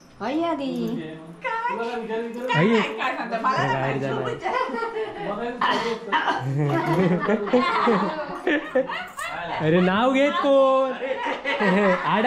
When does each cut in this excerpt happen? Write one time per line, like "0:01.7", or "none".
none